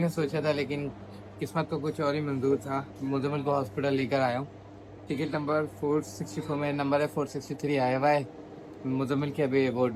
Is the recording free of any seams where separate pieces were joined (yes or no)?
yes